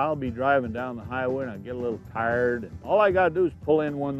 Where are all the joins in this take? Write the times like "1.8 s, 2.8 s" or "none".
2.7 s